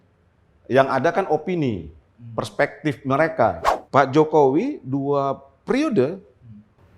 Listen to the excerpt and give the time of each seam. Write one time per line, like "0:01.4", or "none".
0:03.7